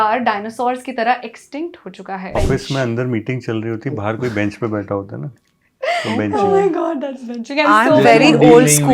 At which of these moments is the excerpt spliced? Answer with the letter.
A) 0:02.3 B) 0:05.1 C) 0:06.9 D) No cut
A